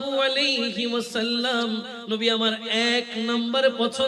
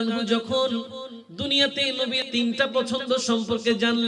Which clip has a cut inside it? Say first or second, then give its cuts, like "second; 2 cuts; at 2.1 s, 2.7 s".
second; 1 cut; at 2.2 s